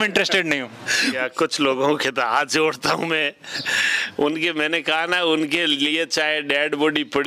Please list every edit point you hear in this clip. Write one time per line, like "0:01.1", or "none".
0:01.2

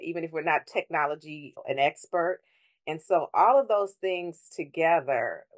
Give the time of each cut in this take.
0:01.6

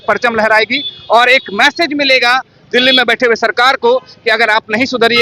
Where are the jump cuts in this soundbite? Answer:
none

